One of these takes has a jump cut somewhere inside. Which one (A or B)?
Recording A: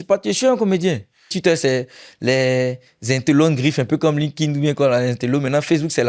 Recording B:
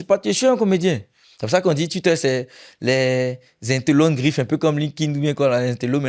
A